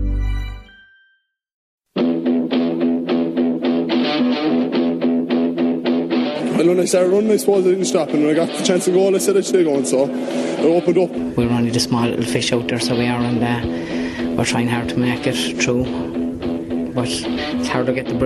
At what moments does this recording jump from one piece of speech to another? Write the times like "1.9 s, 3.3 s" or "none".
1.7 s